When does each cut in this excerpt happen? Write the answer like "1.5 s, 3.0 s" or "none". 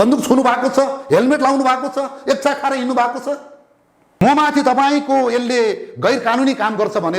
4.2 s